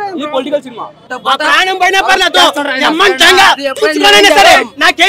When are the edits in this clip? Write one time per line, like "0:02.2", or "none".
0:01.1